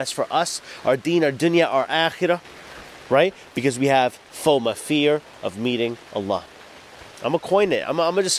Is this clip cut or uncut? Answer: uncut